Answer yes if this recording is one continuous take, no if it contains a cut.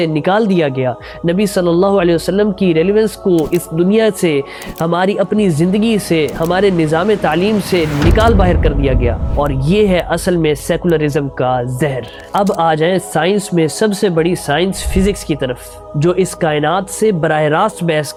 yes